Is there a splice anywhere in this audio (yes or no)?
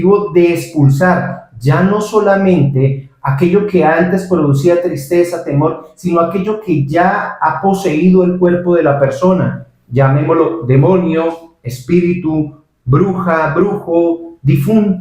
no